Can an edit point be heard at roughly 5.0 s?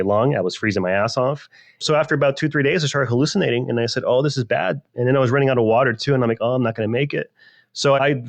no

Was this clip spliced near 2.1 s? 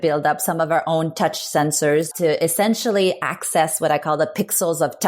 yes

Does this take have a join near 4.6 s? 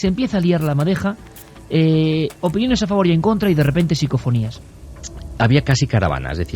yes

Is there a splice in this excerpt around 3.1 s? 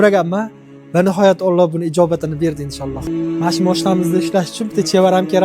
yes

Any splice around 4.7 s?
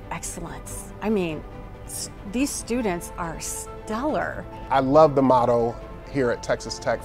yes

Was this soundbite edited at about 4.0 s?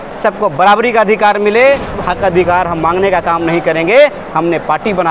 no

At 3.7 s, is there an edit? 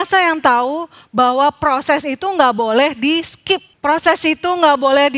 yes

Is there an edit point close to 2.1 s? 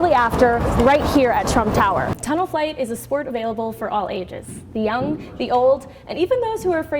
yes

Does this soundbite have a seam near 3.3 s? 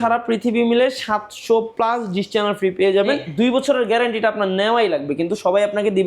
yes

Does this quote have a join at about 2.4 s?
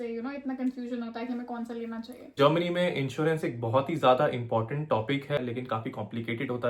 yes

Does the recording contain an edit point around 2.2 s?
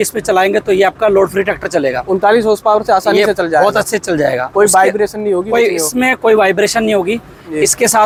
no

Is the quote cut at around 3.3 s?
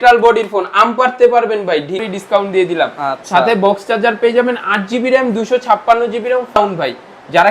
no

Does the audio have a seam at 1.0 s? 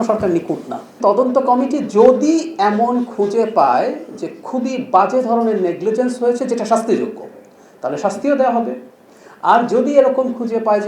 yes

